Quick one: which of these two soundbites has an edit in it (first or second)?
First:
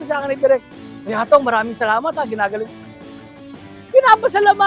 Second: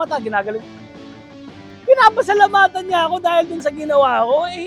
second